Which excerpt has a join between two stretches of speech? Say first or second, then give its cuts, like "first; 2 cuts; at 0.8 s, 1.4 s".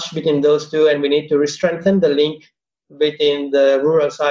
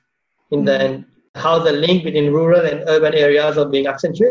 second; 1 cut; at 1.4 s